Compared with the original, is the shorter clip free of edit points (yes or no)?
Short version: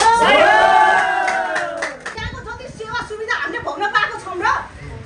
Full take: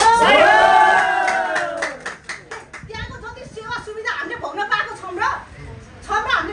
no